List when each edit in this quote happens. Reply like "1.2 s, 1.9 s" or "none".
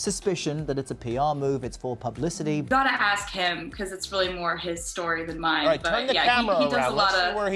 2.7 s